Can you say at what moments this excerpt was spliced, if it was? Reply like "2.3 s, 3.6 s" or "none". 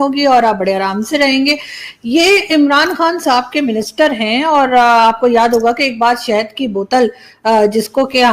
none